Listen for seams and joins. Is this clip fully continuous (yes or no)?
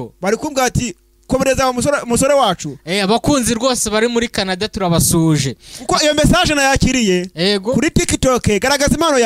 yes